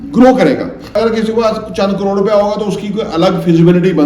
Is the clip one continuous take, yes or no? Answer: no